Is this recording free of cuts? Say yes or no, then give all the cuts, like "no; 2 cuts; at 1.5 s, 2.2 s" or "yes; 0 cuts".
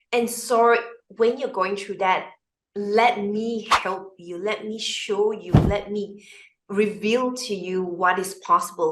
yes; 0 cuts